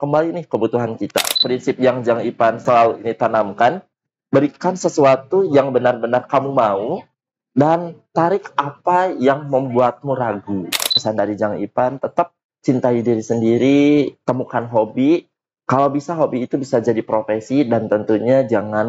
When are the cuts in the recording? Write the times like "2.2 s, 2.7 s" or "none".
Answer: 1.4 s, 2.6 s, 11.0 s

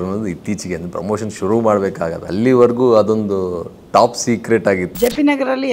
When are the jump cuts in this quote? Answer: 2.2 s, 4.9 s

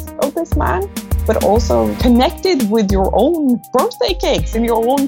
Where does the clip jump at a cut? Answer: none

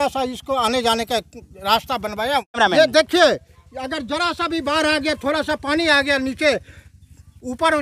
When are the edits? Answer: 2.6 s

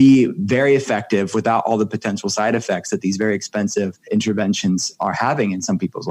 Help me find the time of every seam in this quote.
4.0 s

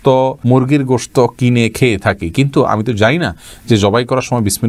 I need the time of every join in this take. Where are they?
none

